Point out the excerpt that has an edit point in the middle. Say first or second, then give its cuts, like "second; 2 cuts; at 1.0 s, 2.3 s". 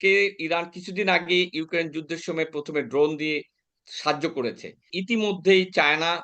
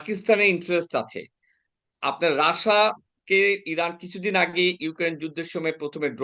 first; 1 cut; at 5.0 s